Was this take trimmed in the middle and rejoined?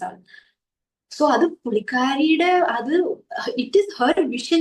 no; 0 cuts

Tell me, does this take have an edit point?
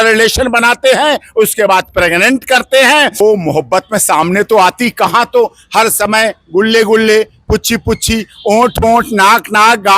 yes; 1 cut; at 3.2 s

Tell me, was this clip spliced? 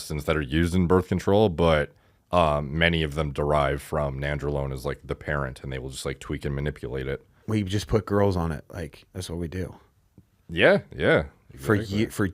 yes; 1 cut; at 7.3 s

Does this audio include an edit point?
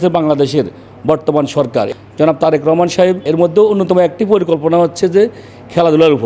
yes; 2 cuts; at 1.9 s, 3.2 s

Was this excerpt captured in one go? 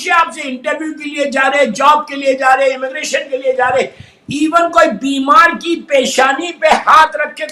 yes; 0 cuts

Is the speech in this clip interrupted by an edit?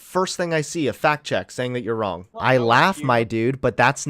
yes; 1 cut; at 2.3 s

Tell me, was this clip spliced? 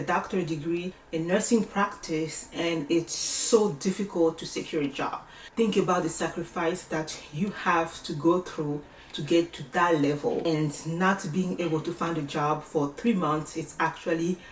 yes; 2 cuts; at 1.0 s, 5.4 s

